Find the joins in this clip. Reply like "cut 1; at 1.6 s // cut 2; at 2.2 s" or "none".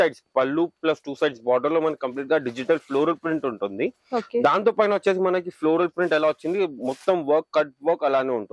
none